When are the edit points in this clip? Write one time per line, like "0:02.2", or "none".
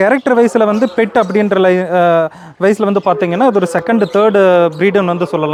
none